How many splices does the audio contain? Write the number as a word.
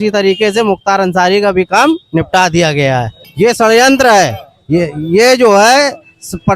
one